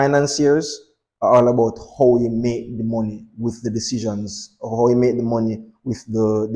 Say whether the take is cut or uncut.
uncut